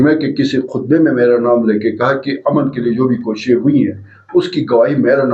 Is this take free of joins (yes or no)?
yes